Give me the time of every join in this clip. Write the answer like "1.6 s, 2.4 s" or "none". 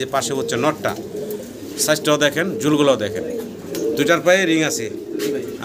none